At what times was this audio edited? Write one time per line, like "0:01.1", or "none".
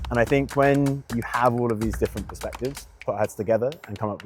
none